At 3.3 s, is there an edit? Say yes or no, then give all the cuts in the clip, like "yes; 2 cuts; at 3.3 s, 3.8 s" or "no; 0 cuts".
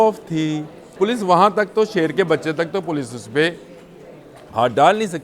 no; 1 cut; at 0.9 s